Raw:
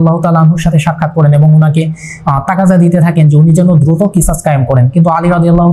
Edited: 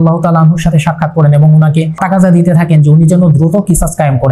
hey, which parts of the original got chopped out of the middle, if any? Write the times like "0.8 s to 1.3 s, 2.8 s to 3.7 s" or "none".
2.0 s to 2.4 s